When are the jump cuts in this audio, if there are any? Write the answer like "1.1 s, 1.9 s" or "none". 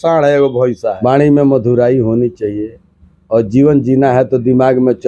1.0 s